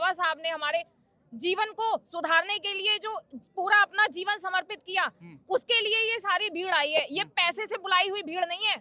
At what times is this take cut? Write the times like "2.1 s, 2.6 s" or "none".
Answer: none